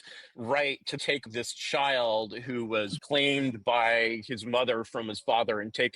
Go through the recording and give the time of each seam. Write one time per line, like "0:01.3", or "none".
0:01.2
0:03.0